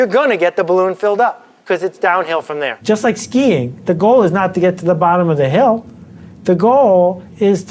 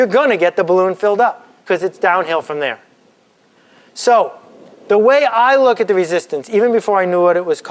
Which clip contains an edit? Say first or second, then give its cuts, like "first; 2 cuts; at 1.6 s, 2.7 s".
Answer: first; 1 cut; at 2.7 s